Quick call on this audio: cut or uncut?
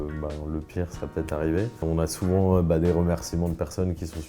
cut